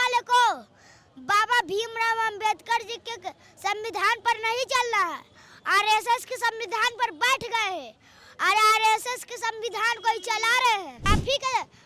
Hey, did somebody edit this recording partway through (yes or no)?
yes